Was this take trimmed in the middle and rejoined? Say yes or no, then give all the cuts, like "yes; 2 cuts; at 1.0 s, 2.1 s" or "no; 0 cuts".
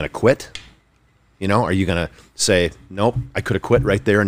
no; 0 cuts